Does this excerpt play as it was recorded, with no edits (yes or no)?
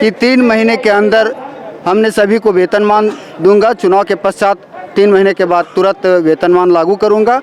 yes